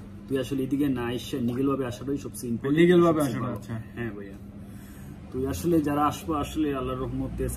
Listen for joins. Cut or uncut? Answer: uncut